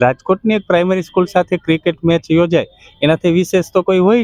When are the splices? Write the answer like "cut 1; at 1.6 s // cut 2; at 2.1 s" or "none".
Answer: none